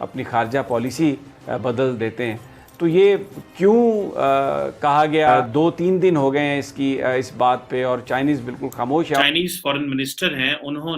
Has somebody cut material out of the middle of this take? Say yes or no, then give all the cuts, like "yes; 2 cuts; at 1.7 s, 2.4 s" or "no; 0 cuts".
yes; 2 cuts; at 5.5 s, 9.2 s